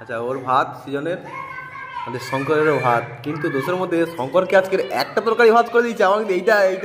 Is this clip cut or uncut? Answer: uncut